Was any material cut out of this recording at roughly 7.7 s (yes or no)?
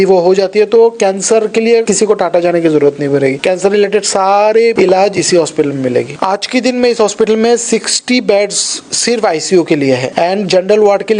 no